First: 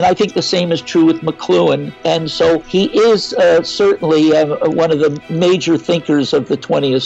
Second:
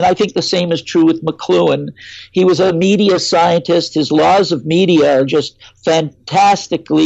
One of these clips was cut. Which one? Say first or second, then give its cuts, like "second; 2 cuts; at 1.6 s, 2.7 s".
first; 2 cuts; at 2.3 s, 5.2 s